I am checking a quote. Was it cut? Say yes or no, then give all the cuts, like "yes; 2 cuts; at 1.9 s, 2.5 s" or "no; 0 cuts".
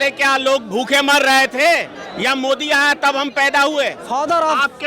yes; 2 cuts; at 2.0 s, 4.0 s